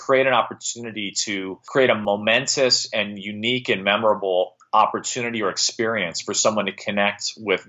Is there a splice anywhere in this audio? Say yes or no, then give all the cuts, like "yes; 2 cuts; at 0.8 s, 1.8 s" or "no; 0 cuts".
yes; 1 cut; at 2.0 s